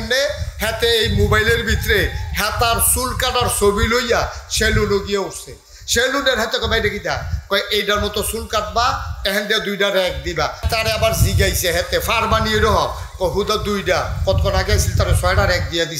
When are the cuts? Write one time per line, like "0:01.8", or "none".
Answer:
0:10.6